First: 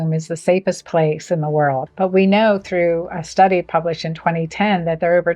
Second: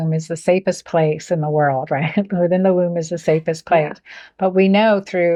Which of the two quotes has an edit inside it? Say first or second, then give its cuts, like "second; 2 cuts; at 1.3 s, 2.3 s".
first; 1 cut; at 1.8 s